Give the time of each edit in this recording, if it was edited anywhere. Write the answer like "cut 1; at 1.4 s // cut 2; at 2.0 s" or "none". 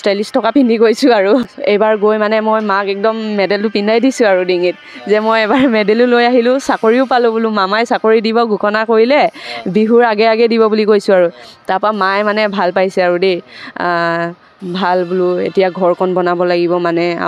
cut 1; at 1.4 s